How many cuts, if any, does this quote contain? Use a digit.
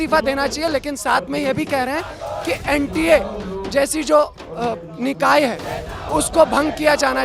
0